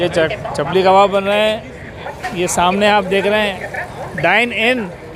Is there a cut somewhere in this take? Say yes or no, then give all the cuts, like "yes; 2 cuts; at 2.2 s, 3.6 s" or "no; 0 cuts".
no; 0 cuts